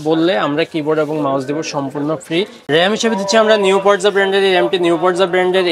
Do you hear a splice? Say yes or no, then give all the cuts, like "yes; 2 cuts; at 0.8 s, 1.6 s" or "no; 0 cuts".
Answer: yes; 1 cut; at 2.6 s